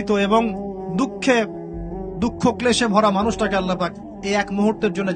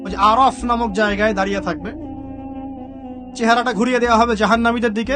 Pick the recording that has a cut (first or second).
second